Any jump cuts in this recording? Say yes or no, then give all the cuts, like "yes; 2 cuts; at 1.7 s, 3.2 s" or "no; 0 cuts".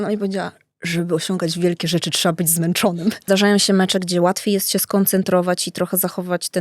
yes; 1 cut; at 3.2 s